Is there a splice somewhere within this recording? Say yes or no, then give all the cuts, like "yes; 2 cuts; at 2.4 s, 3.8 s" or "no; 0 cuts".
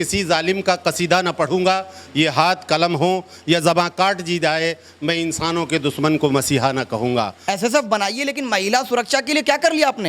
yes; 1 cut; at 7.4 s